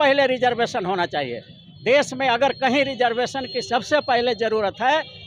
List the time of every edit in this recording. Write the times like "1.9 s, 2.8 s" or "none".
none

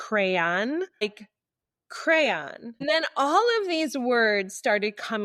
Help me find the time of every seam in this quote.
1.0 s, 2.8 s

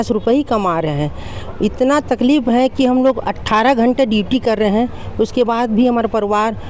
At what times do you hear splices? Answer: none

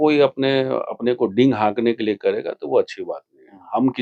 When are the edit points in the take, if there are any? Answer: none

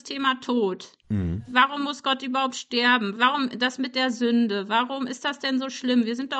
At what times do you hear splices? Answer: none

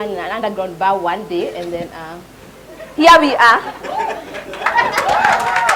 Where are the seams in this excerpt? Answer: none

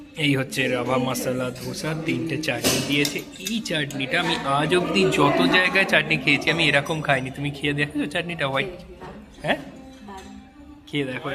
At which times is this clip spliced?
none

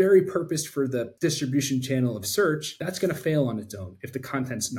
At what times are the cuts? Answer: 1.1 s, 2.7 s

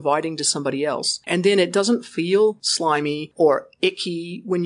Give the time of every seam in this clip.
1.2 s, 2.9 s

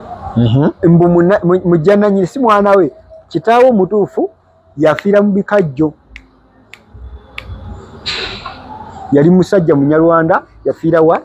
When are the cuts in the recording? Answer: none

